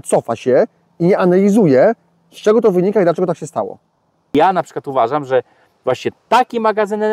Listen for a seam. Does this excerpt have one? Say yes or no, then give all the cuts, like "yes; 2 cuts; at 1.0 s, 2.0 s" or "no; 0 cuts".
yes; 1 cut; at 4.3 s